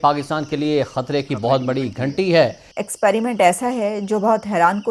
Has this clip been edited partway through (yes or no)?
yes